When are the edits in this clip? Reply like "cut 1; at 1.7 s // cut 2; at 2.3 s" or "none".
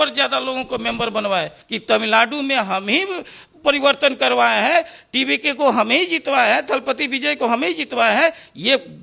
cut 1; at 1.6 s